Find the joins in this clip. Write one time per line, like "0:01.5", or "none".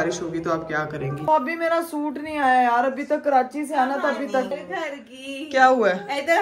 0:01.3
0:04.5